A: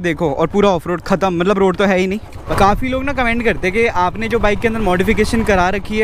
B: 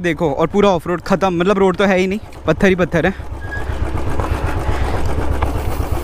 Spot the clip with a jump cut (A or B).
A